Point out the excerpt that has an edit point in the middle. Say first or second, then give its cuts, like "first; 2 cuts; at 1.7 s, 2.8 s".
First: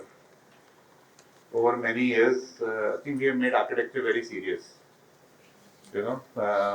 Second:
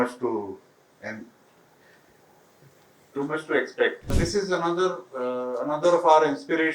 second; 1 cut; at 4.2 s